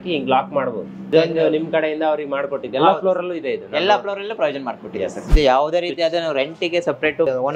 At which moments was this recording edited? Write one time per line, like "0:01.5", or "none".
0:05.3